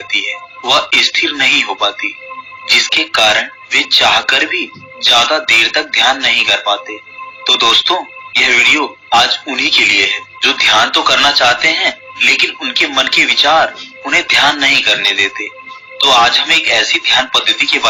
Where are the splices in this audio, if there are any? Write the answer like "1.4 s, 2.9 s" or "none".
none